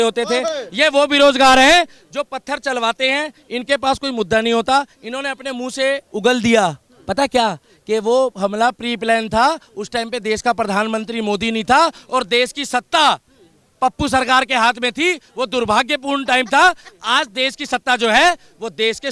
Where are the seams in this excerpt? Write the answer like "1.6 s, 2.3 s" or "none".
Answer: none